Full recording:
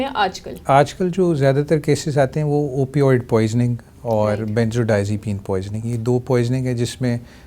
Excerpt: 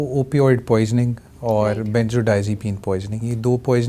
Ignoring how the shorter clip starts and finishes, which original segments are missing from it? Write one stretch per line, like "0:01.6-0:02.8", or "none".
none